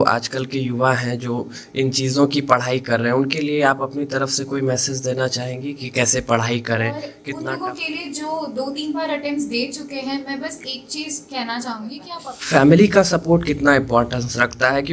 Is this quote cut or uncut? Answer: cut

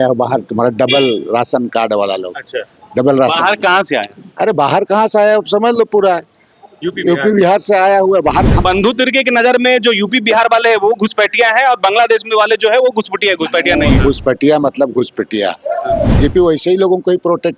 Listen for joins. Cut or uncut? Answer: cut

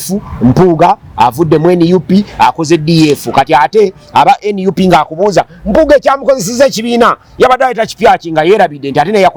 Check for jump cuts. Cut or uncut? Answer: uncut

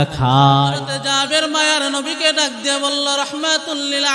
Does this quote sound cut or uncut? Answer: cut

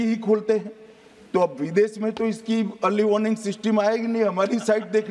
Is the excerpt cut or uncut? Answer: uncut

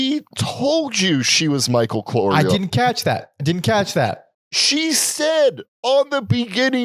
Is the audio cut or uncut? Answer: uncut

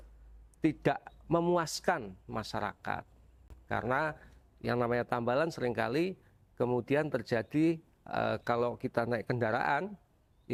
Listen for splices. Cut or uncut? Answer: uncut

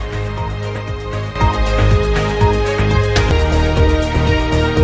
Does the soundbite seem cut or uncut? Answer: uncut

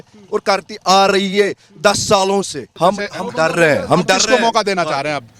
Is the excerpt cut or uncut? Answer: uncut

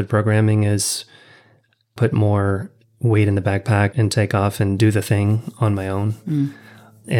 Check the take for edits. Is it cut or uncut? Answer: uncut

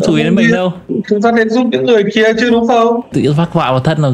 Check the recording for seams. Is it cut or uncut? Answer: cut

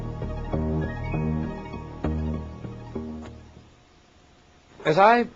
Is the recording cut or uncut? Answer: uncut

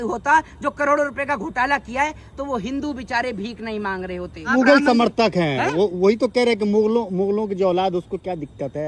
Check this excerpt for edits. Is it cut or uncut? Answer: cut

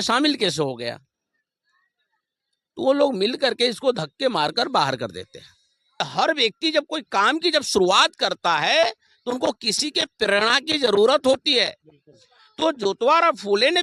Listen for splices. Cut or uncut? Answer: cut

